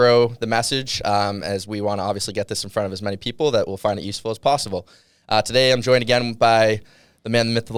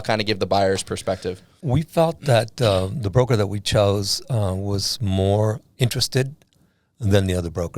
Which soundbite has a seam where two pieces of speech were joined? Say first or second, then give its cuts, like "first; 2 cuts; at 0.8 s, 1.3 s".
second; 1 cut; at 1.5 s